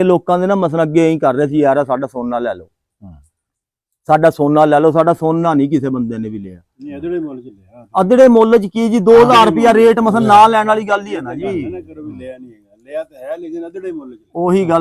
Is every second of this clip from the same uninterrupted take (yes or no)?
yes